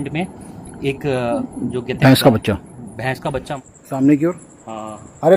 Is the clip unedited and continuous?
no; 1 cut; at 3.5 s

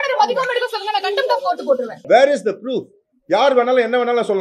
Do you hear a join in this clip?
yes; 1 cut; at 1.9 s

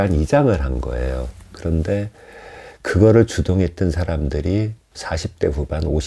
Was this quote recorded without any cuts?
no; 1 cut; at 4.9 s

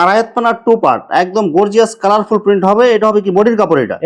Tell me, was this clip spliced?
no; 0 cuts

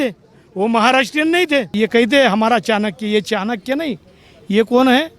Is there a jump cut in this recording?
yes; 1 cut; at 1.7 s

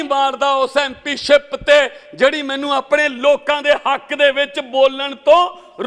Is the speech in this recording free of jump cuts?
yes; 0 cuts

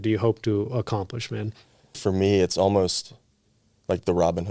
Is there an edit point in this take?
yes; 1 cut; at 2.0 s

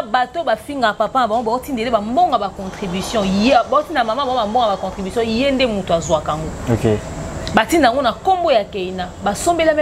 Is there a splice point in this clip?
no; 0 cuts

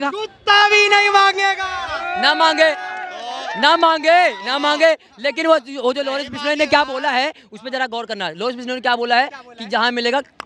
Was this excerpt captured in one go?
yes; 0 cuts

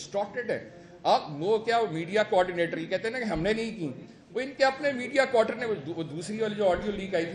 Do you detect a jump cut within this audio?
no; 0 cuts

